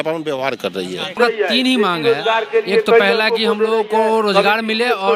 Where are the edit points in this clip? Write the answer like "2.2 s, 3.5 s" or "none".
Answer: 1.2 s